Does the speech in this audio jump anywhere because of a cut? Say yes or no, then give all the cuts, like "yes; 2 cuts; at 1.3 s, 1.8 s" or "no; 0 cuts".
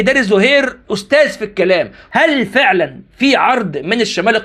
yes; 1 cut; at 2.0 s